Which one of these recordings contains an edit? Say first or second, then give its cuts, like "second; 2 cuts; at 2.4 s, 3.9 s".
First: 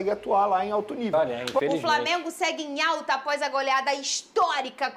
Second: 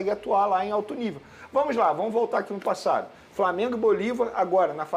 first; 1 cut; at 1.1 s